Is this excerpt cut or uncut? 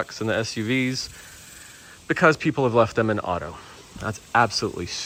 uncut